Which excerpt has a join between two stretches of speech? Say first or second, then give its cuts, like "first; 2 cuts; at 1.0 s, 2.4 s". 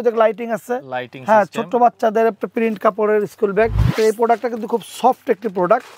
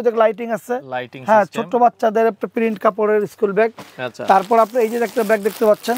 first; 1 cut; at 3.9 s